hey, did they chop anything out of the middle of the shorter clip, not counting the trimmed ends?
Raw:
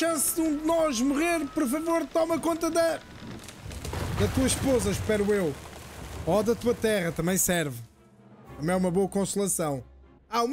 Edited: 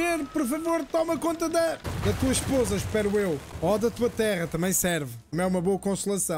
yes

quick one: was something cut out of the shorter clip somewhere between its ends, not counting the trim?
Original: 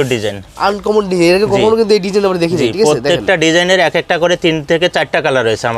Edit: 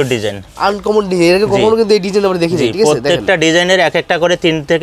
no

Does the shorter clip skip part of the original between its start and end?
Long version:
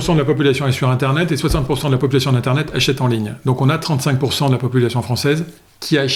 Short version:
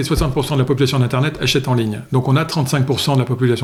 no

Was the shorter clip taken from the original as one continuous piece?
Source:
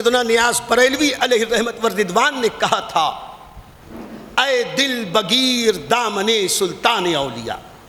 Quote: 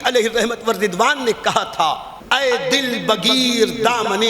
no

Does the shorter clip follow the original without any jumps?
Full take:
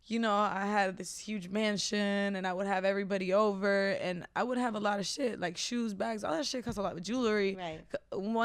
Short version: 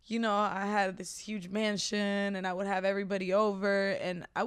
yes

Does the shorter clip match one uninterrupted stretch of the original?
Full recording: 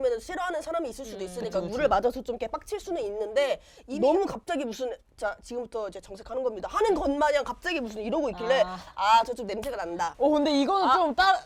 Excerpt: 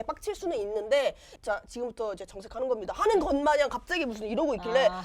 no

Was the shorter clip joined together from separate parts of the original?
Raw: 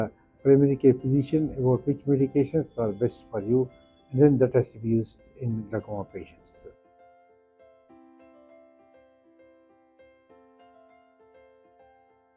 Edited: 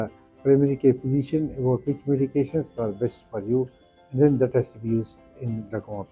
no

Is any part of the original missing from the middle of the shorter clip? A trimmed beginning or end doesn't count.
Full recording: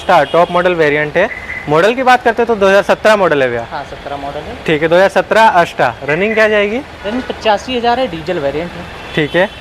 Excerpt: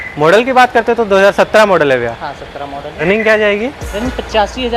yes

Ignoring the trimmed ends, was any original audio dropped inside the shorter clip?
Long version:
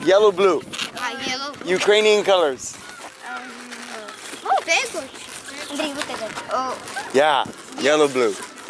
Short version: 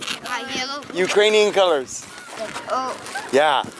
yes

